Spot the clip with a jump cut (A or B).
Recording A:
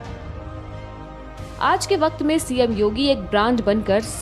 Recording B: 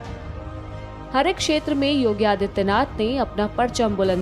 B